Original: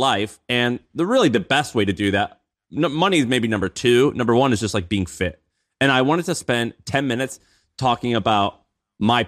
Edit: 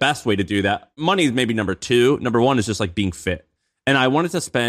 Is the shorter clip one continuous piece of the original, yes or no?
no